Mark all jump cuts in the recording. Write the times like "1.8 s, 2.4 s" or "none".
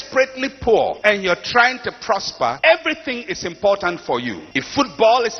1.0 s, 2.6 s, 4.4 s